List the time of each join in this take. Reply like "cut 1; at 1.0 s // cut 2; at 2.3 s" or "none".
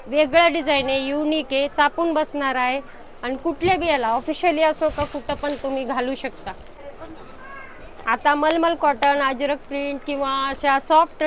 cut 1; at 7.2 s